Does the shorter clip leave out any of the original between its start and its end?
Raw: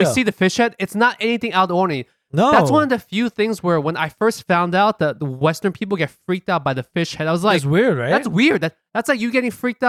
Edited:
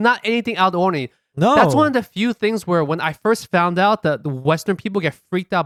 no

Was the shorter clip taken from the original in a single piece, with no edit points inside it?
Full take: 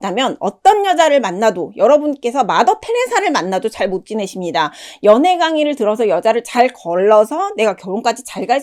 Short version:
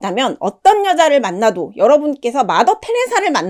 yes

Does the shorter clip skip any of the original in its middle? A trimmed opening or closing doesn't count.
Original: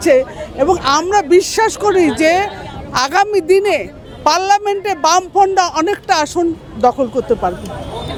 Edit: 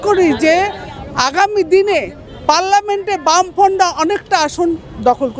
no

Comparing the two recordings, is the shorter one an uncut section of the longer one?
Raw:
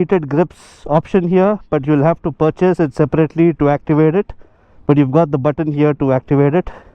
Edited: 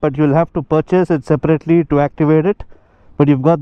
yes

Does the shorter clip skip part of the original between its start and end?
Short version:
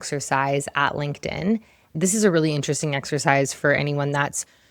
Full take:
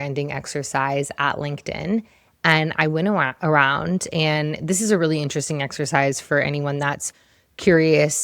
yes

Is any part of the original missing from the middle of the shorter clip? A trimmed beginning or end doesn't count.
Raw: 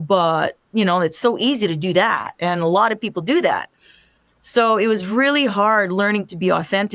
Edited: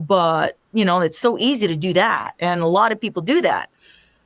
no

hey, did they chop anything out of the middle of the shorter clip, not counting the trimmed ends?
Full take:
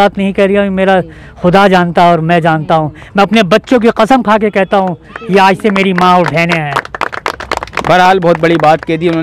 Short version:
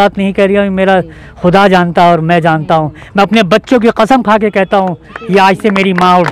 no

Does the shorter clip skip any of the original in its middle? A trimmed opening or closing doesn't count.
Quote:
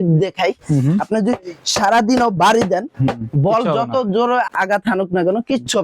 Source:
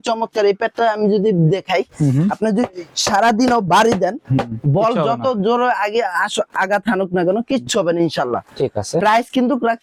yes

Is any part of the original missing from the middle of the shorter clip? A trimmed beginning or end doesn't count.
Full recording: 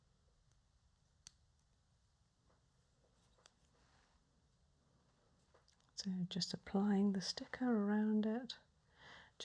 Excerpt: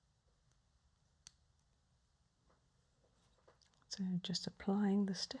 yes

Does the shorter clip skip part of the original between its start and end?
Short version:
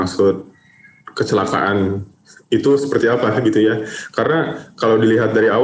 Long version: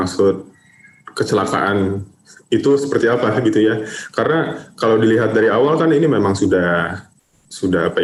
no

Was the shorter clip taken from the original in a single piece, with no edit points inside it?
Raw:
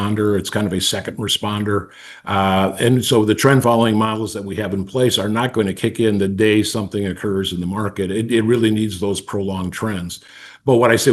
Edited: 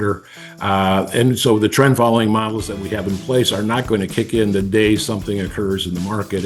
yes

